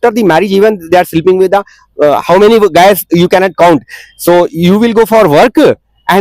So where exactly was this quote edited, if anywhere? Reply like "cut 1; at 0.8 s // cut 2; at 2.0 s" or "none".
none